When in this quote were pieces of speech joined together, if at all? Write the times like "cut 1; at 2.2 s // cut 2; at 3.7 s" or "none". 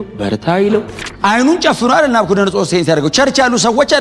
cut 1; at 1.0 s